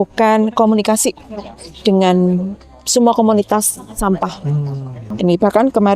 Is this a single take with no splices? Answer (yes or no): no